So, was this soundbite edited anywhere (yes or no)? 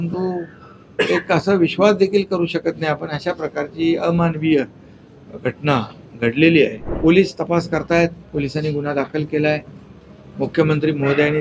yes